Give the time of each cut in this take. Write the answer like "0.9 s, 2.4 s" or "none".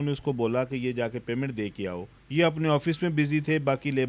2.1 s